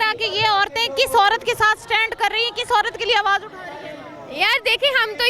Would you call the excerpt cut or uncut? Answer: uncut